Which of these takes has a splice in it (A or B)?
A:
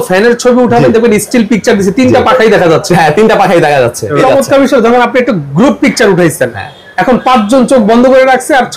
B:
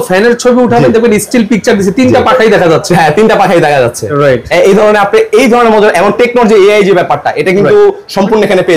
A